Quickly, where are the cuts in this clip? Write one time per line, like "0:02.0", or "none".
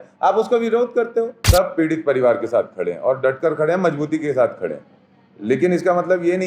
0:01.4